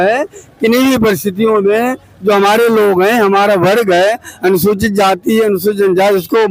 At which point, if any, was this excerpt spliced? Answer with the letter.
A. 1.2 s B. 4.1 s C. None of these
C